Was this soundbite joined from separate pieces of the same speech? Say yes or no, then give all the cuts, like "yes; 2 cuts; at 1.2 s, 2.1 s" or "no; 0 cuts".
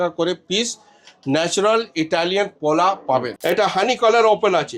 yes; 1 cut; at 3.3 s